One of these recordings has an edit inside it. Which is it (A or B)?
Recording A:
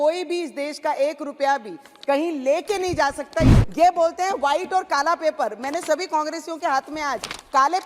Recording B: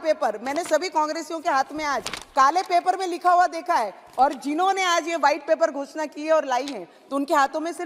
A